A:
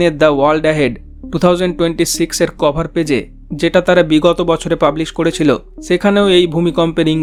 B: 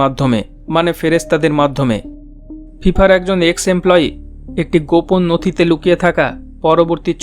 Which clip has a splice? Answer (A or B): B